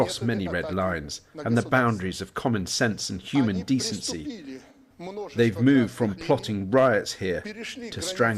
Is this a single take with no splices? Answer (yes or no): yes